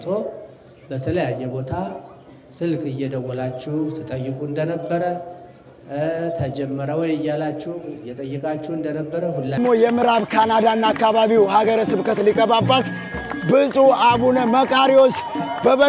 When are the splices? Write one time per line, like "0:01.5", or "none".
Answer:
0:09.6